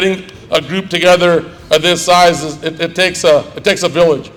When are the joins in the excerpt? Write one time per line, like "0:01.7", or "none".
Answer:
none